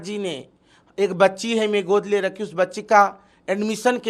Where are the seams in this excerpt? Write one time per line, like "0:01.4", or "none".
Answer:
none